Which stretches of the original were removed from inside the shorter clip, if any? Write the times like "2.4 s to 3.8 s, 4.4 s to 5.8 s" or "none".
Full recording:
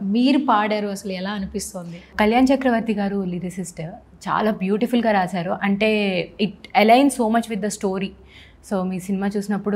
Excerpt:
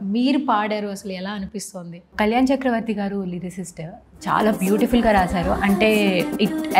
none

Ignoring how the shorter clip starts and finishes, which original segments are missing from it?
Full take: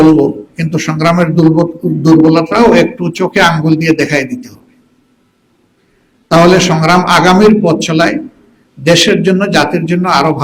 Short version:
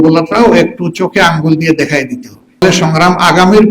4.8 s to 6.5 s

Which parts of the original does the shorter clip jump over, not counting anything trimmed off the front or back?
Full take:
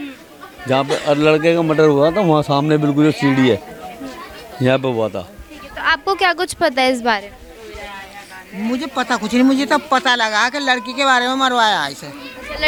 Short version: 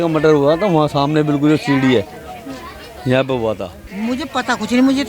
5.3 s to 8.4 s

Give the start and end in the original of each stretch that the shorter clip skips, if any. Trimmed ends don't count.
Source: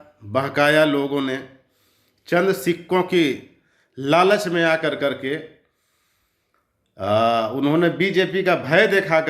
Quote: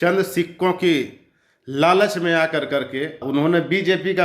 5.5 s to 7.5 s

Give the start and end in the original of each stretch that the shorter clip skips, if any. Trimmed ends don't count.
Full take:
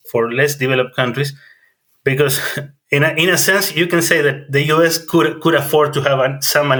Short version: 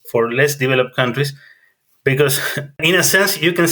2.8 s to 3.2 s

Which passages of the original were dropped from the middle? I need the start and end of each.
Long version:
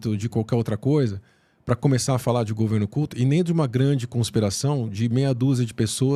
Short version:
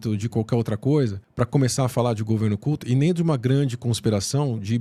1.2 s to 1.5 s

